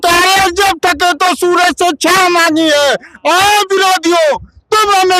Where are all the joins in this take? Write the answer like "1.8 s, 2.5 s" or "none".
none